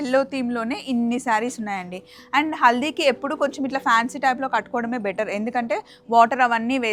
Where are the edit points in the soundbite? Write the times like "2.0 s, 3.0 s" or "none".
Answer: none